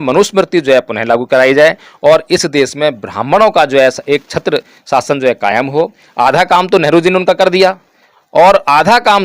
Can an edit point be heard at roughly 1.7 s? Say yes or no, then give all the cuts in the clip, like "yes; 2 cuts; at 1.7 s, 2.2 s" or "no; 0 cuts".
no; 1 cut; at 6.0 s